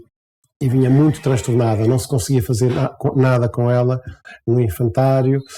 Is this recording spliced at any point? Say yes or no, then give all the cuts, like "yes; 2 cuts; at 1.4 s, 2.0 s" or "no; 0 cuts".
no; 0 cuts